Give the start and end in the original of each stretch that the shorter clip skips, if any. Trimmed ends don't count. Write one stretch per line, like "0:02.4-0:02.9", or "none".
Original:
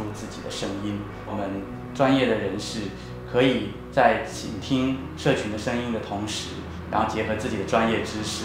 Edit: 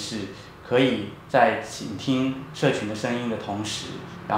none